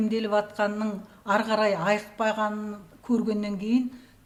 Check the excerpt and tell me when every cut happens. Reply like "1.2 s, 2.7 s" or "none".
none